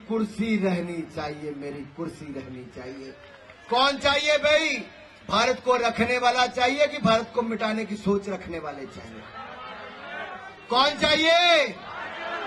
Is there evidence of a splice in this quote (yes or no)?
no